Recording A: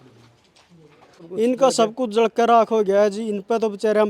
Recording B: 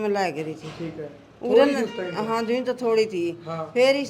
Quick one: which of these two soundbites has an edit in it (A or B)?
A